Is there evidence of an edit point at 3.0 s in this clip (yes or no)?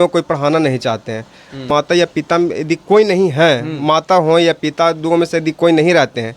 no